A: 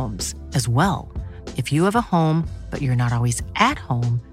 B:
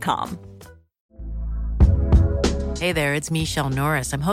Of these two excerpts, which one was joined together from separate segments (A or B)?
B